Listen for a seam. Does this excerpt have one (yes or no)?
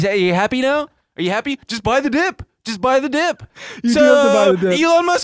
no